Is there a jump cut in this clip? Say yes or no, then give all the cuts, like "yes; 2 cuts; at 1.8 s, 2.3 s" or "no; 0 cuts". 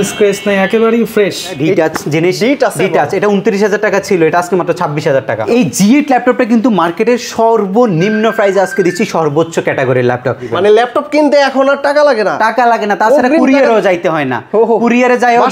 yes; 3 cuts; at 1.6 s, 5.4 s, 10.5 s